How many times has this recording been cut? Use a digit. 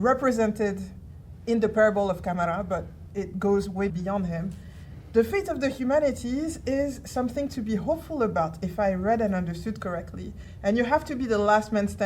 1